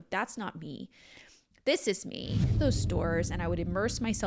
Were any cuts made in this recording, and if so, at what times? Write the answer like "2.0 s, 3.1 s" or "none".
2.6 s